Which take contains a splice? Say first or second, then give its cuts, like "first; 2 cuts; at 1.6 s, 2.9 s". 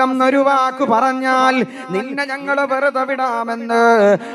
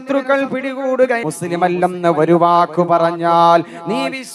second; 1 cut; at 1.2 s